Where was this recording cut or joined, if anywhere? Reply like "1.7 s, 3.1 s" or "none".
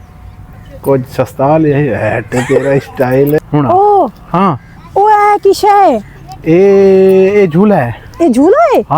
3.4 s